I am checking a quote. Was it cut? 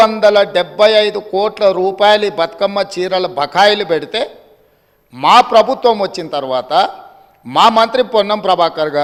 no; 0 cuts

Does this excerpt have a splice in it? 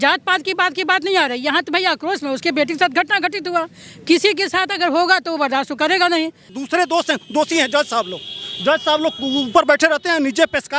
yes; 1 cut; at 6.6 s

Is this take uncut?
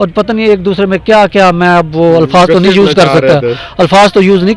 yes; 0 cuts

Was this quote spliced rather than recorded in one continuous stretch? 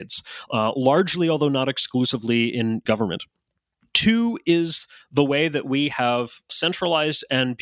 yes; 2 cuts; at 2.8 s, 6.5 s

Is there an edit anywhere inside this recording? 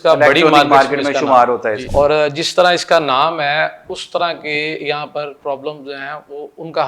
yes; 1 cut; at 1.8 s

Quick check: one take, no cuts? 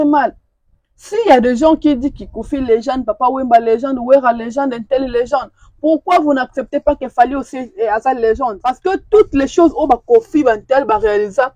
no; 1 cut; at 8.8 s

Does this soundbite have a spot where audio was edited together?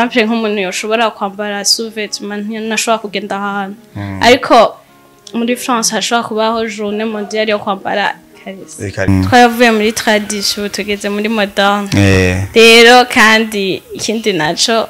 yes; 1 cut; at 9.1 s

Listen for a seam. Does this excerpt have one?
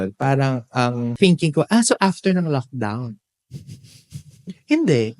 yes; 1 cut; at 1.1 s

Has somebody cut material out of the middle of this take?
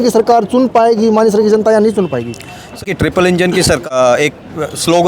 yes; 2 cuts; at 2.8 s, 3.8 s

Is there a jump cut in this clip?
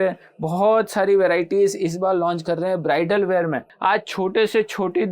yes; 1 cut; at 3.7 s

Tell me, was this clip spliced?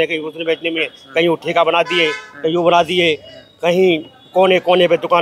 no; 0 cuts

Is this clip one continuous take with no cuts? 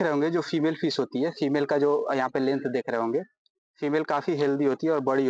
yes; 0 cuts

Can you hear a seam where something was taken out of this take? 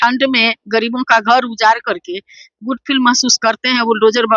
no; 0 cuts

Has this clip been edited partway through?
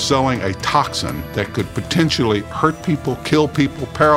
yes; 1 cut; at 1.3 s

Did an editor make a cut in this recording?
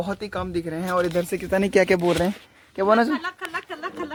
no; 0 cuts

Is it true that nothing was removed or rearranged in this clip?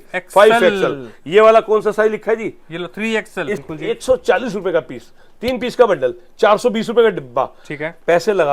no; 1 cut; at 3.6 s

